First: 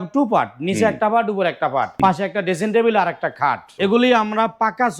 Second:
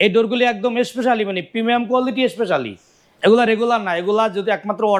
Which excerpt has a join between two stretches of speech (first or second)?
first